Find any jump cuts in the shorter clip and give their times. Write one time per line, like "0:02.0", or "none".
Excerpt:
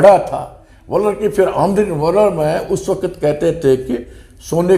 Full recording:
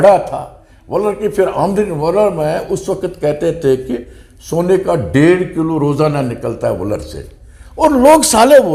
none